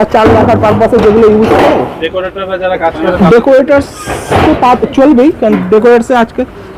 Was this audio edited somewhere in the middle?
no; 0 cuts

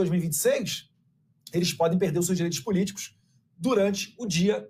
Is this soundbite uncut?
yes; 0 cuts

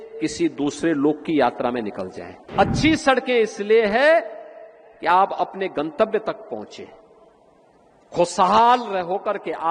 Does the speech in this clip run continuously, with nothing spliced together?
no; 1 cut; at 2.5 s

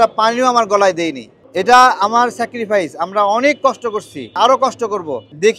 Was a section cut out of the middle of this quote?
yes; 2 cuts; at 1.4 s, 4.3 s

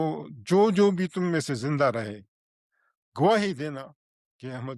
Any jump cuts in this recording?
no; 0 cuts

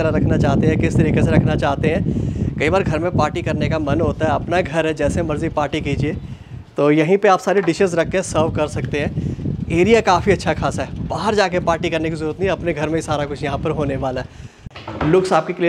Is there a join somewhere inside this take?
yes; 1 cut; at 14.6 s

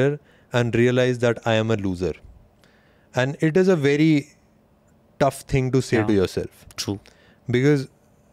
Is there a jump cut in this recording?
no; 0 cuts

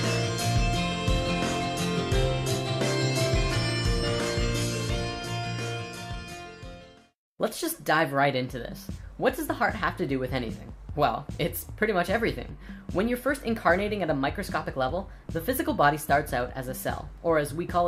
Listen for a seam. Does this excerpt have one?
no; 0 cuts

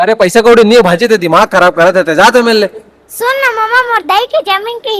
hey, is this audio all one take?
yes; 0 cuts

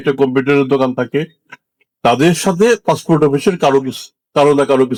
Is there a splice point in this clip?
no; 0 cuts

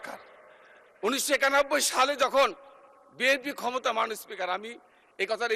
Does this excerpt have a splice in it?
no; 0 cuts

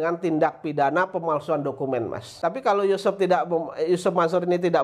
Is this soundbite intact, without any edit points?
no; 1 cut; at 2.2 s

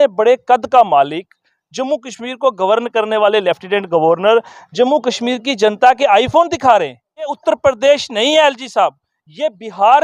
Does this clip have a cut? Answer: yes; 1 cut; at 7.4 s

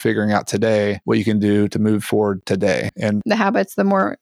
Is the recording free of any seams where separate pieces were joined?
no; 1 cut; at 3.2 s

